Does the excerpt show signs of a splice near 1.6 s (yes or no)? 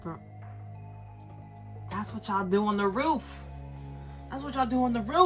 no